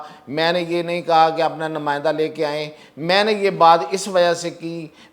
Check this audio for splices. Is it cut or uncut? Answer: uncut